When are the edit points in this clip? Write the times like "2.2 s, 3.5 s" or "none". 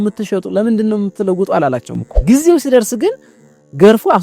2.1 s

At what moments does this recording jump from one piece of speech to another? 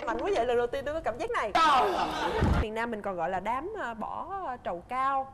2.6 s

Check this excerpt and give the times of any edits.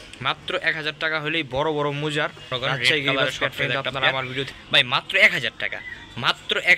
4.5 s

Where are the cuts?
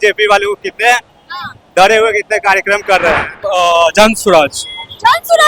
3.4 s

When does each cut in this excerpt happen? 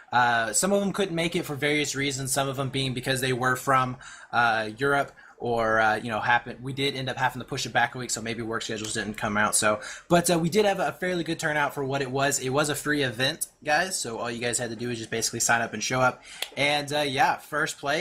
6.2 s

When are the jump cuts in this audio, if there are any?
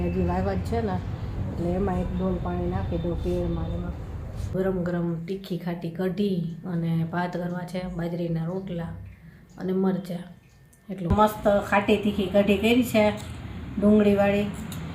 4.5 s, 11.1 s

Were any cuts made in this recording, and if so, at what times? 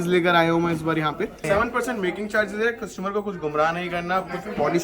1.4 s

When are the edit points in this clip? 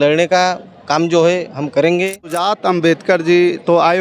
2.4 s

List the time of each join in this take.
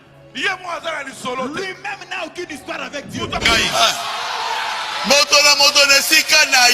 3.4 s

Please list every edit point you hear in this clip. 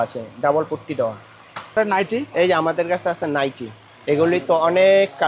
1.8 s

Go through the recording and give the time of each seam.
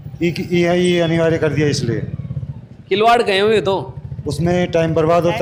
none

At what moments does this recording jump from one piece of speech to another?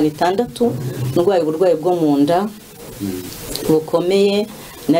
none

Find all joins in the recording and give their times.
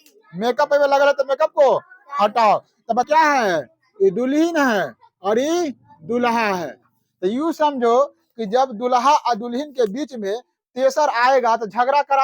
3.0 s

